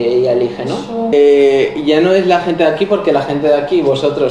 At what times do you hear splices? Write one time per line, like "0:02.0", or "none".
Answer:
0:01.1